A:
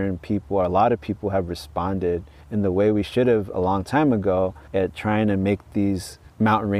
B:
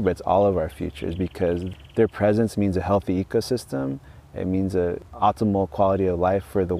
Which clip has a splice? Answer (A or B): B